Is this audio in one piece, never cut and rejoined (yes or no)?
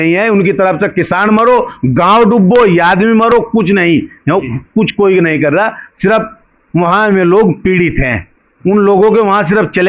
yes